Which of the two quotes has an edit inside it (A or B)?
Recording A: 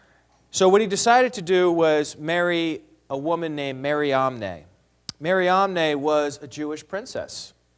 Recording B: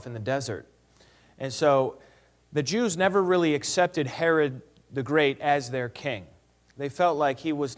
B